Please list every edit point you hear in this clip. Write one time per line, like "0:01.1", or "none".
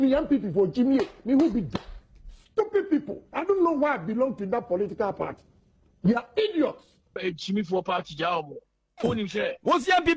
0:06.9